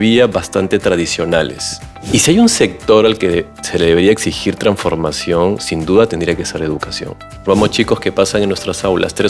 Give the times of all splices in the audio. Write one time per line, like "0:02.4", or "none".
0:02.1
0:07.4